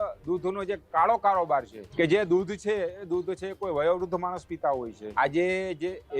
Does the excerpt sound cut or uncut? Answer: cut